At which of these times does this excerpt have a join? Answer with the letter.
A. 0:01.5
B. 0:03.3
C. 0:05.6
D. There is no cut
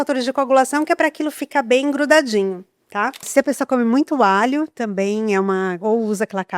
B